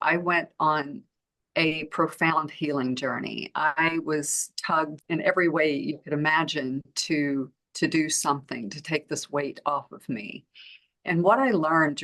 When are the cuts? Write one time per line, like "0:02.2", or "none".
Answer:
none